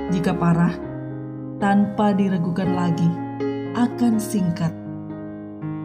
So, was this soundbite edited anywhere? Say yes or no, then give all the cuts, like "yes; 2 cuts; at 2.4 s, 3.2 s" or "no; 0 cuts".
yes; 1 cut; at 4.7 s